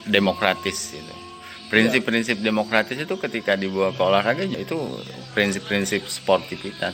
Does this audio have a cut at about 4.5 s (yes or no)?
yes